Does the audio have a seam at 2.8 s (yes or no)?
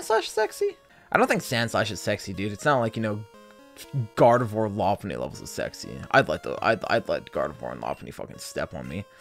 no